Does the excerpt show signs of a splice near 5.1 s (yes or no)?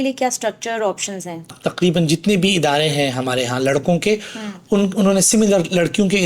no